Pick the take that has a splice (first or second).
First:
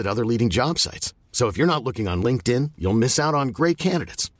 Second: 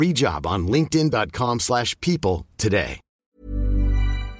second